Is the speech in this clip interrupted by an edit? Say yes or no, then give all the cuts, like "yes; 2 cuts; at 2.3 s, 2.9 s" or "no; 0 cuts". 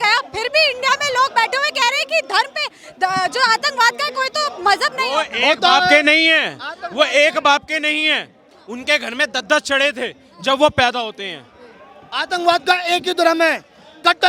no; 0 cuts